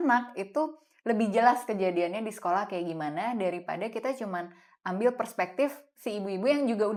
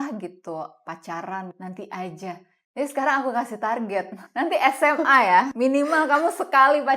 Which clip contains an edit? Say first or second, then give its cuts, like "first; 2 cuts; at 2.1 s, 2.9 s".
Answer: second; 3 cuts; at 1.5 s, 4.2 s, 5.5 s